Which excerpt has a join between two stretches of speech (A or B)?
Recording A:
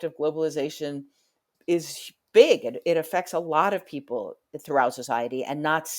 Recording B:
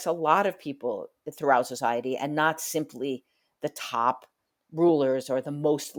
A